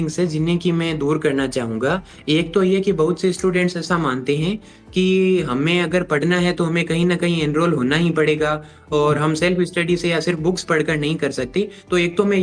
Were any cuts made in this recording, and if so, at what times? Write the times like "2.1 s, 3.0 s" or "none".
none